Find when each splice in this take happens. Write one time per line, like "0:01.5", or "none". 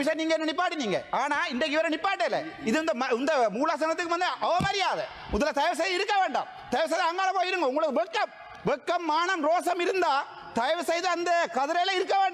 none